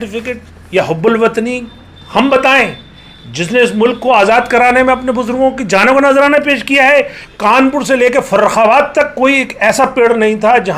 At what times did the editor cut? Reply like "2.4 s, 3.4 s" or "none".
7.2 s